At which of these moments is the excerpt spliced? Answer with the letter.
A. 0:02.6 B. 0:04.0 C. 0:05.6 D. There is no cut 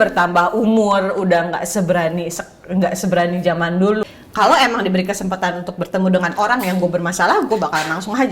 B